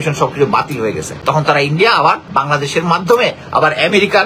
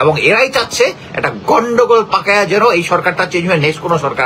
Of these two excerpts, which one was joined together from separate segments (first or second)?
first